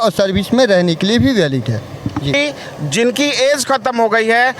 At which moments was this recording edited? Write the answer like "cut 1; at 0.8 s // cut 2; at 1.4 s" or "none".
cut 1; at 2.3 s